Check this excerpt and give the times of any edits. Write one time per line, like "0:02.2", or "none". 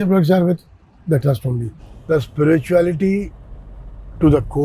0:01.8